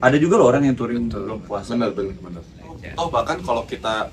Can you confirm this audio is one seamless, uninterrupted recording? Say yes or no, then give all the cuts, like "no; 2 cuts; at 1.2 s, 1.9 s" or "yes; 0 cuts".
no; 1 cut; at 2.8 s